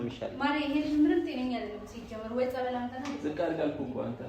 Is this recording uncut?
yes; 0 cuts

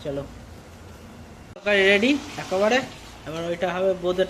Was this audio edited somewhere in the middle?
yes; 1 cut; at 1.4 s

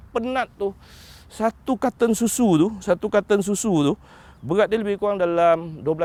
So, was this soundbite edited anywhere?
no; 0 cuts

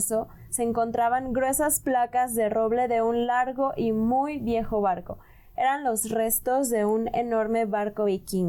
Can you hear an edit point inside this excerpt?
no; 0 cuts

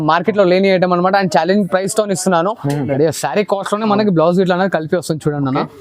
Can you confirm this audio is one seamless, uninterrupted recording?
no; 1 cut; at 2.9 s

